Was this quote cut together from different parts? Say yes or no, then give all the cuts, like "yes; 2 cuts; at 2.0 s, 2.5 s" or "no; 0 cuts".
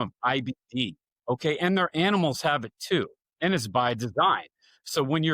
yes; 2 cuts; at 1.1 s, 3.2 s